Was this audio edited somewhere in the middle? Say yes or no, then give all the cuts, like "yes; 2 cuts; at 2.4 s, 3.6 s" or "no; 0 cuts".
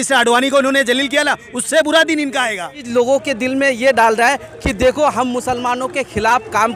yes; 1 cut; at 2.8 s